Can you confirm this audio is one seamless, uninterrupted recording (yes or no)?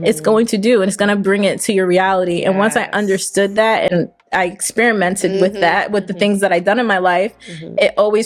yes